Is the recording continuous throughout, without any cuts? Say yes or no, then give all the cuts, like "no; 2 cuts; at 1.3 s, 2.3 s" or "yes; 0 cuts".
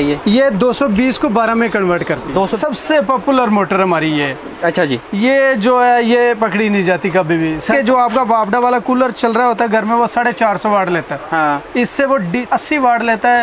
no; 3 cuts; at 2.5 s, 7.7 s, 12.4 s